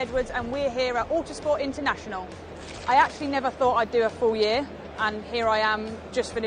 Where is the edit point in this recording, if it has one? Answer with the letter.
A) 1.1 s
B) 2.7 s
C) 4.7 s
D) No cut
B